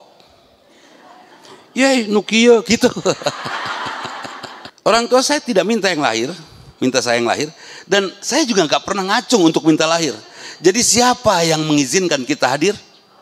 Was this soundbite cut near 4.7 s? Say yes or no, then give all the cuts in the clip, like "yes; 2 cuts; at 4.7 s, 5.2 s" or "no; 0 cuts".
yes; 1 cut; at 4.7 s